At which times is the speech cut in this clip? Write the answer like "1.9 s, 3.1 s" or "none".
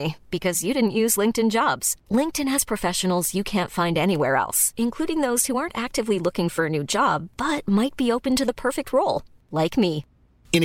none

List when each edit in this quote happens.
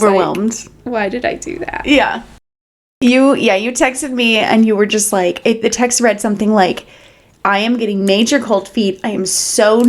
2.4 s

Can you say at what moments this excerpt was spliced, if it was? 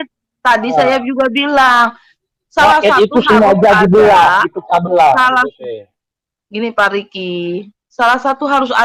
none

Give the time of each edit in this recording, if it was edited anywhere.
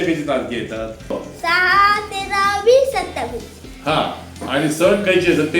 1.1 s

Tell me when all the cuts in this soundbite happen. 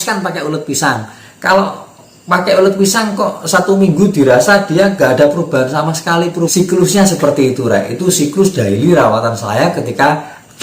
6.5 s

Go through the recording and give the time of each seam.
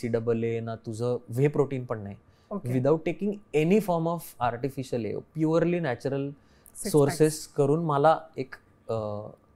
none

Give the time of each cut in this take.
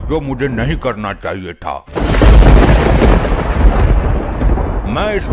1.8 s

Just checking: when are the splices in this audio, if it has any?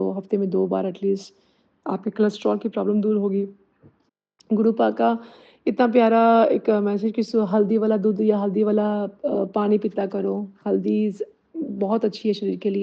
none

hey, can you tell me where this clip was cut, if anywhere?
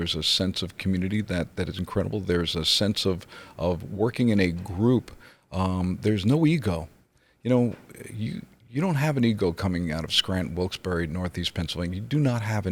none

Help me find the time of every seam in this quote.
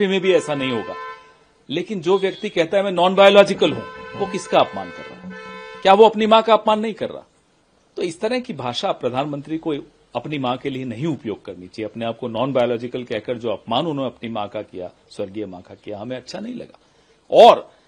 none

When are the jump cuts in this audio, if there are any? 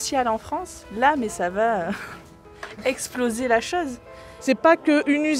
4.3 s

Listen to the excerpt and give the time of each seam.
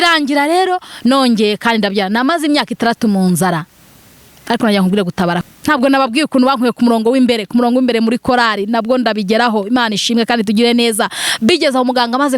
5.5 s

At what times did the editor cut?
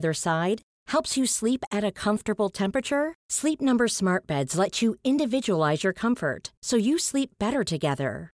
none

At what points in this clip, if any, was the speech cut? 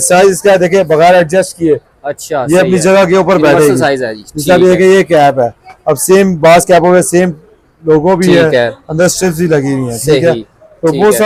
none

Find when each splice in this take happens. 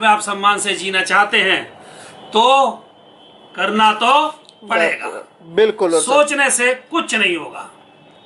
none

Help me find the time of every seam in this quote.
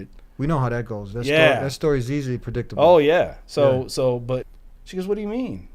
4.5 s

